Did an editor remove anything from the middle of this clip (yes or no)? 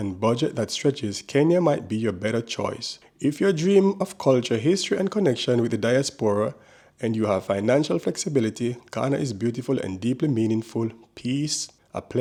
no